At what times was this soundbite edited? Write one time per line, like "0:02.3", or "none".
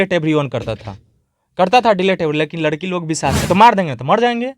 0:03.4